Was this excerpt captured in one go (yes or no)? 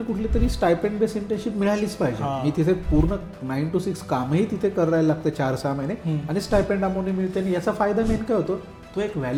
yes